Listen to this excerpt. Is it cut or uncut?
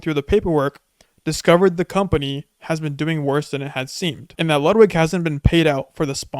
cut